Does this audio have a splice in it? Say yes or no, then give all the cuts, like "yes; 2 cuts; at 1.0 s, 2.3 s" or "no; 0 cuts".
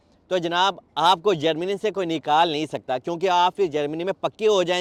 no; 0 cuts